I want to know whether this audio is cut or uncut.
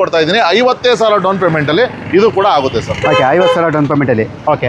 uncut